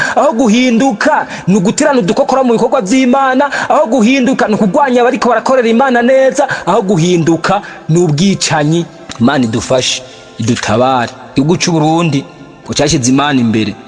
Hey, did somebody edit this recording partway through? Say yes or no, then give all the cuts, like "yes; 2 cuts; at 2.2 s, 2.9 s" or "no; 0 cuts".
yes; 1 cut; at 9.0 s